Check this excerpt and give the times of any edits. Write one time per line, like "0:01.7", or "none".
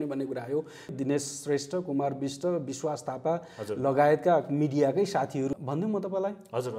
0:00.9
0:05.5